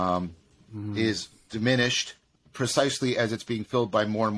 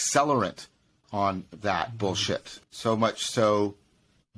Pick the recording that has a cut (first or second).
second